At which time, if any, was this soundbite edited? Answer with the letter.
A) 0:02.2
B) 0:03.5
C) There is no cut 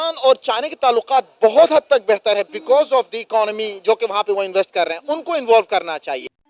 C